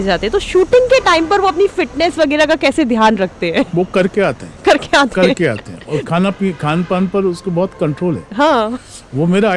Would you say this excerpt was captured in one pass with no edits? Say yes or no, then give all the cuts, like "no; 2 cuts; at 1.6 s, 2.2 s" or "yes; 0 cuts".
yes; 0 cuts